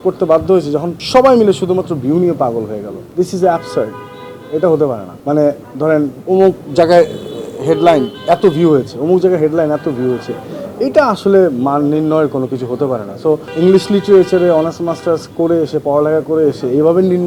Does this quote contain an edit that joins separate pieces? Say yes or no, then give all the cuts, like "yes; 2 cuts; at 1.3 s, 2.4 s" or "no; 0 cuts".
yes; 5 cuts; at 1.0 s, 3.0 s, 5.1 s, 6.2 s, 13.5 s